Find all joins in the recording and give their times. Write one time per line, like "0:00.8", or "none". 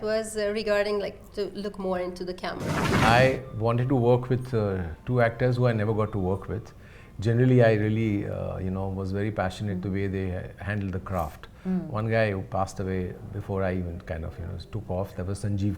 0:02.9

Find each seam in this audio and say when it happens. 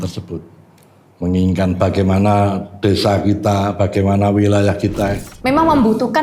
0:05.3

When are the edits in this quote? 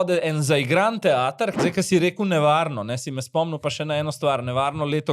0:01.6

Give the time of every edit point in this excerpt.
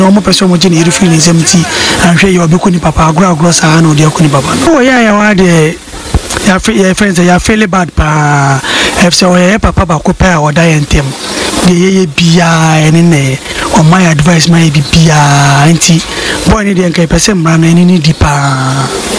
none

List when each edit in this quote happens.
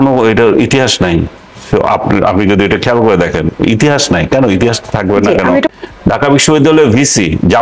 0:05.7

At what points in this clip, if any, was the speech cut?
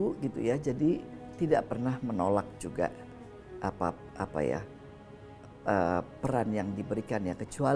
none

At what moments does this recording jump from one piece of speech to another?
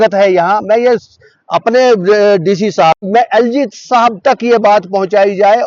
0:03.0

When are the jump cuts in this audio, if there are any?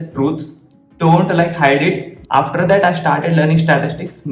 0:02.1

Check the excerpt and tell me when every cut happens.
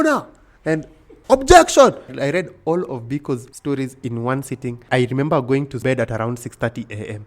0:02.1
0:03.5
0:04.8
0:05.8

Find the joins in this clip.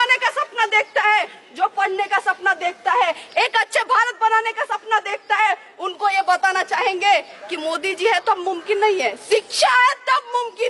none

